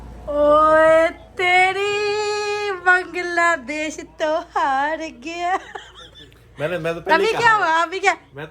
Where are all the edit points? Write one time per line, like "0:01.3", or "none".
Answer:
0:06.8